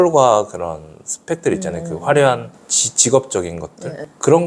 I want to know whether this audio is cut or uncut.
uncut